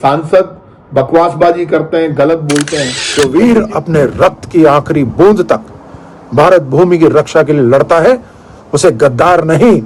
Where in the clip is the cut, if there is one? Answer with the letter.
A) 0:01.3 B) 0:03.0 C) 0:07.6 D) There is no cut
B